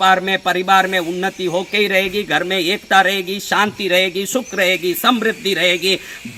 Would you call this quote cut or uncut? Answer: uncut